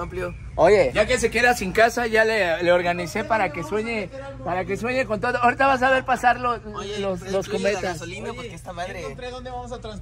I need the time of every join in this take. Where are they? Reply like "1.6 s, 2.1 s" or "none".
none

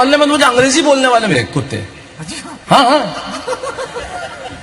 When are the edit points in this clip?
1.3 s

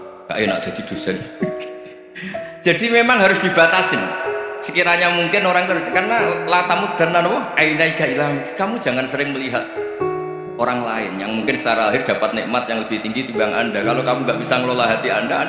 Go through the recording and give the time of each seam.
9.7 s, 10.6 s

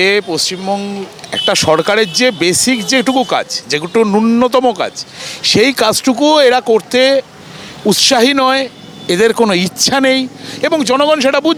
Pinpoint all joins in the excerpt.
none

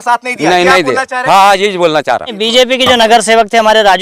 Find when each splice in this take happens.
2.4 s

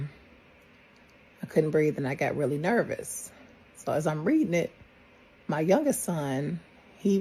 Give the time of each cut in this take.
none

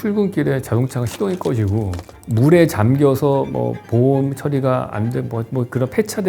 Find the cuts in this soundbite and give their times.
2.2 s

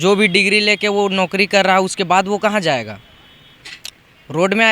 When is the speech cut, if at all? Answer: none

